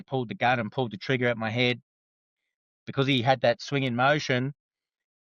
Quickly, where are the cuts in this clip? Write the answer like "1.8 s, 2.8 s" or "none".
none